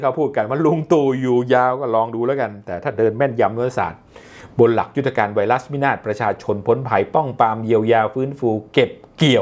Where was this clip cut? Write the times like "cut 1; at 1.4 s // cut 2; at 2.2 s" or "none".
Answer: none